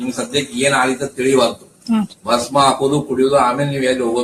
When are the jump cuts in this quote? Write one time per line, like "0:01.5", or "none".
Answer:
none